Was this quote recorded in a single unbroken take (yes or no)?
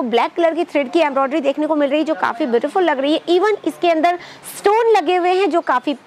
yes